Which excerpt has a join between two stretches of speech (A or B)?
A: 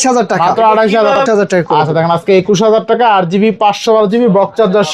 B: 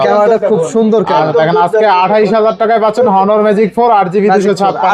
A